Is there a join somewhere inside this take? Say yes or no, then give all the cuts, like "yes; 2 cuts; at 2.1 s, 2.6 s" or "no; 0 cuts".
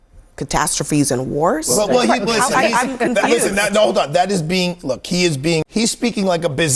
yes; 1 cut; at 5.6 s